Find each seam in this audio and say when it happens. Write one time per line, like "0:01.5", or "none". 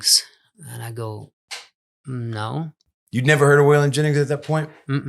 none